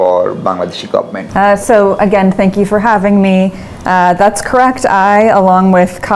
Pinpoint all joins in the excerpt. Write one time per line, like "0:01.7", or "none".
0:01.2

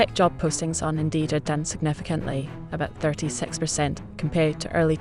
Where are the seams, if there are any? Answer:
none

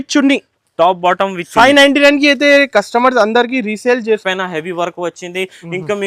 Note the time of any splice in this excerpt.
0:04.2

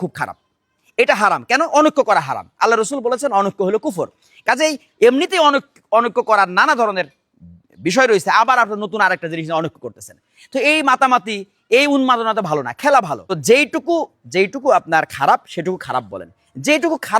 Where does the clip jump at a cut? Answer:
0:13.2

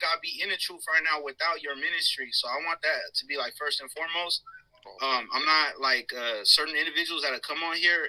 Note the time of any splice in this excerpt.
none

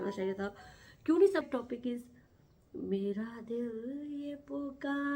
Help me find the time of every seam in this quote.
0:01.4

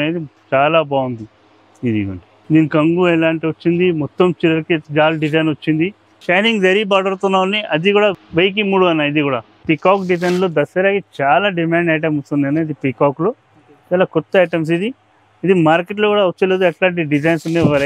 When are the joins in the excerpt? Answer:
0:02.3
0:04.8
0:06.2
0:08.2
0:09.6

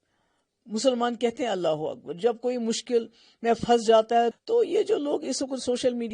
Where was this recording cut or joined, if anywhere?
0:04.4

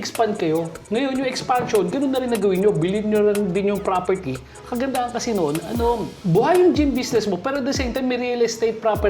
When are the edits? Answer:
0:06.1

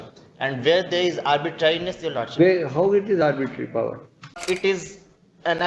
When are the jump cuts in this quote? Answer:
0:04.4

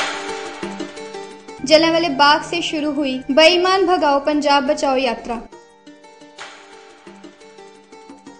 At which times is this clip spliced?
0:00.9

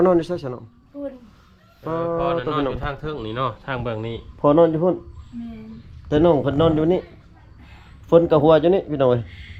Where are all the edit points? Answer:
none

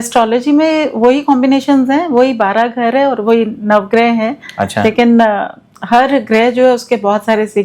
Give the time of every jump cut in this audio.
none

